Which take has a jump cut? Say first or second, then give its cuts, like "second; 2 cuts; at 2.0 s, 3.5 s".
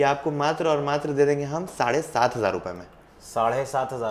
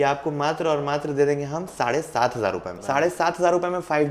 second; 1 cut; at 2.8 s